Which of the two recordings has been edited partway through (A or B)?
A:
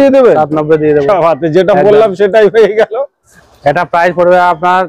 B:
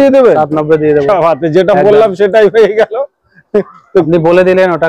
A